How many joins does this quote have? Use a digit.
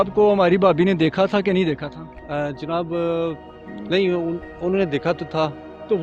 0